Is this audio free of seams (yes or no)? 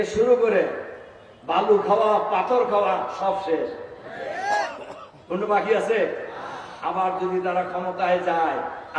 yes